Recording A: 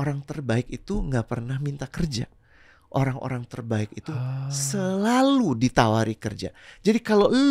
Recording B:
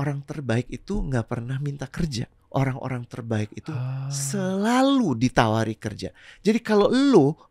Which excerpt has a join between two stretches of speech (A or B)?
B